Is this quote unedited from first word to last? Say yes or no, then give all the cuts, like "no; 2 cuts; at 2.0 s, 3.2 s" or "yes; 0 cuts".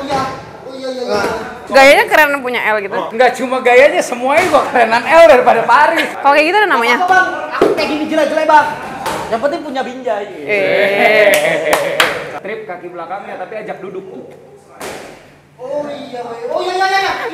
no; 4 cuts; at 1.6 s, 3.1 s, 6.1 s, 12.3 s